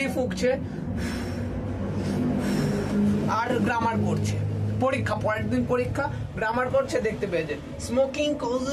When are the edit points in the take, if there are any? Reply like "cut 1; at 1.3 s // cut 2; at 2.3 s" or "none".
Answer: none